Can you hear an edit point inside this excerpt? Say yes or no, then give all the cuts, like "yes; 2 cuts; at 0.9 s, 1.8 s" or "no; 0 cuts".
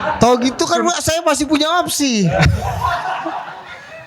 no; 0 cuts